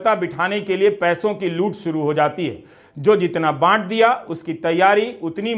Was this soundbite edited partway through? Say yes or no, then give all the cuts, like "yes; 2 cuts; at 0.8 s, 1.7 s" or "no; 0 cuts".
no; 0 cuts